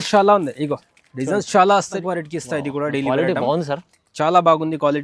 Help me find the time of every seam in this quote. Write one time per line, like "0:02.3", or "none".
0:01.9